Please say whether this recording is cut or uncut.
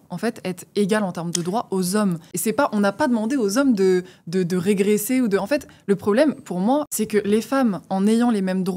cut